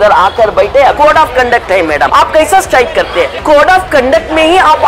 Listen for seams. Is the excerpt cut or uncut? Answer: cut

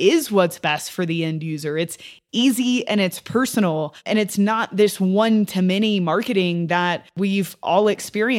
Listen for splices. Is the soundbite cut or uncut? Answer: cut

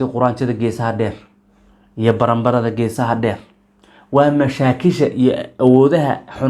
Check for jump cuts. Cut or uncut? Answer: uncut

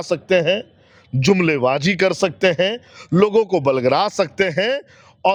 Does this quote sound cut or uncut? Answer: uncut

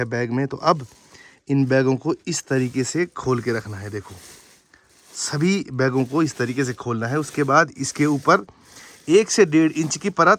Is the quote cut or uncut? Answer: uncut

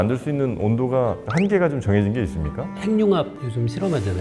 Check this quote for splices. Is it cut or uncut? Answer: cut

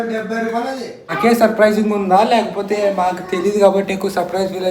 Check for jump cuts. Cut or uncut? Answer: cut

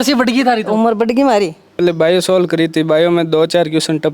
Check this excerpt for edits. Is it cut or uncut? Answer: cut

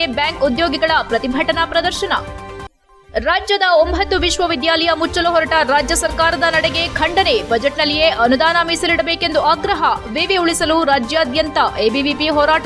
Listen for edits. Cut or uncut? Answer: uncut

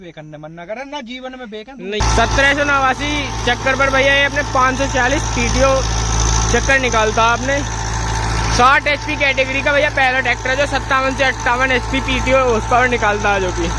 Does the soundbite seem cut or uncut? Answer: cut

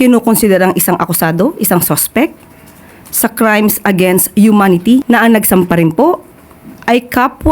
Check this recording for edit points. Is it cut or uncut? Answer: cut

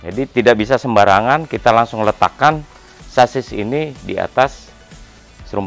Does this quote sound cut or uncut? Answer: uncut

